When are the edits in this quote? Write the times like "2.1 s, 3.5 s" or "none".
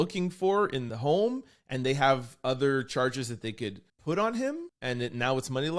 0.8 s, 3.9 s, 4.7 s